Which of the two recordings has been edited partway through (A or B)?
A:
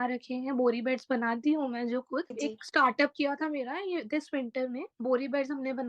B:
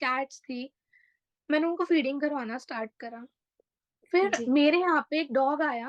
A